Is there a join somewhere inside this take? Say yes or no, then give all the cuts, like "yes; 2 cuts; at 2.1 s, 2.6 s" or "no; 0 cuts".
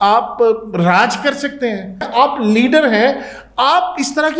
yes; 1 cut; at 2.1 s